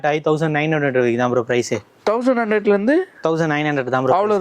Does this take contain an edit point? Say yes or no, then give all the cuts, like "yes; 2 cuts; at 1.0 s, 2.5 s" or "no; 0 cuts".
no; 0 cuts